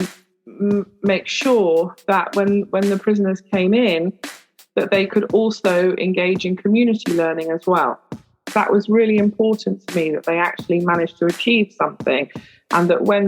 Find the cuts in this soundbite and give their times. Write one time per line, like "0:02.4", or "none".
0:08.5